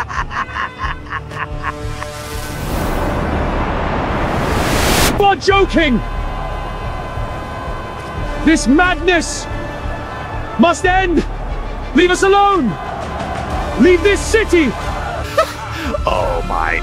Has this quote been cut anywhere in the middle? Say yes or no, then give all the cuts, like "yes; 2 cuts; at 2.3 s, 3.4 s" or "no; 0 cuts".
no; 0 cuts